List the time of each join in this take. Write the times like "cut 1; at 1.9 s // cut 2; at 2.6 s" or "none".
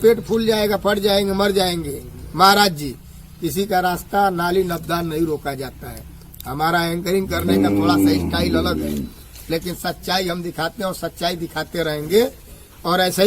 none